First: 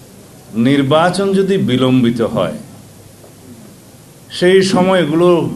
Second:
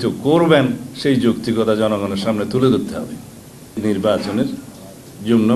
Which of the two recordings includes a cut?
second; 1 cut; at 3.8 s

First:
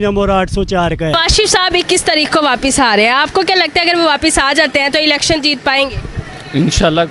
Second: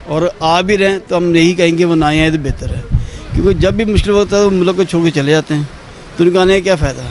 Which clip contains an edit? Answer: first; 1 cut; at 1.1 s

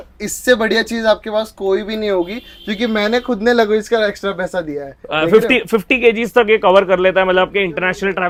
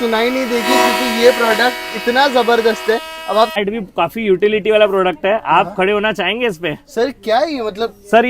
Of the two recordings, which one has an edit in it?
second; 1 cut; at 3.5 s

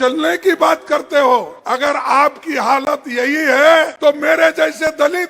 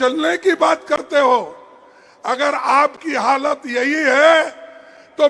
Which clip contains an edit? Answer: first; 2 cuts; at 1.6 s, 3.9 s

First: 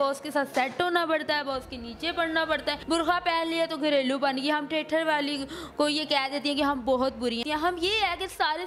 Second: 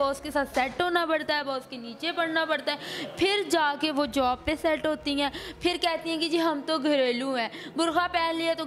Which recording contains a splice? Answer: first; 2 cuts; at 2.8 s, 7.4 s

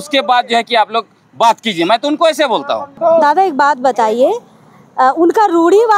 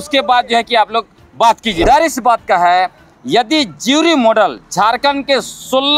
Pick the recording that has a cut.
second; 1 cut; at 1.8 s

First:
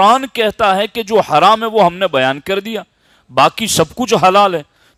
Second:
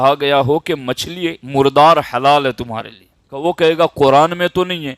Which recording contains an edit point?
second; 2 cuts; at 1.4 s, 3.3 s

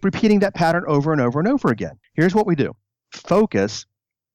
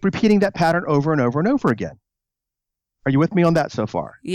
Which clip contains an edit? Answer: first; 1 cut; at 2.0 s

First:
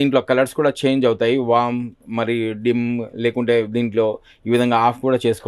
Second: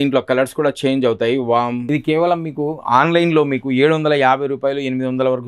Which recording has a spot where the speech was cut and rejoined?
second; 1 cut; at 1.8 s

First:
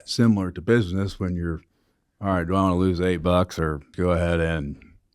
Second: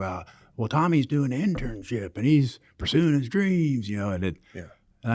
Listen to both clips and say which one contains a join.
first; 1 cut; at 3.9 s

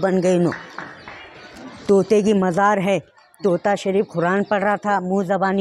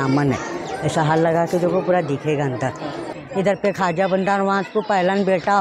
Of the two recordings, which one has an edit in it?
second; 1 cut; at 3.2 s

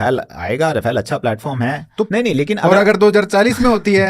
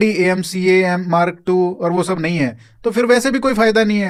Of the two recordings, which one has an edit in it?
first; 1 cut; at 2.1 s

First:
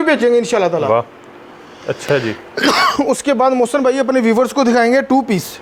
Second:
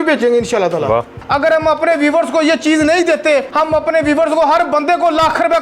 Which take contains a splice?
second; 2 cuts; at 1.2 s, 3.5 s

